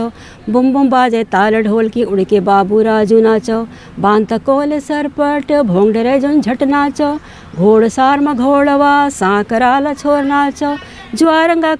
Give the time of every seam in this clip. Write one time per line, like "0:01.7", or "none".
none